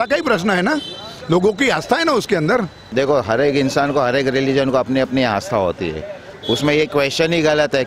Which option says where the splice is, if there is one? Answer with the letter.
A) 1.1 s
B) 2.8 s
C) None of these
B